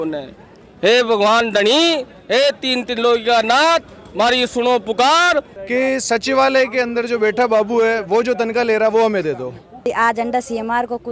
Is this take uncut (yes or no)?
no